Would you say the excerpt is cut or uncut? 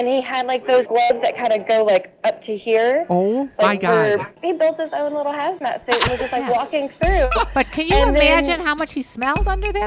cut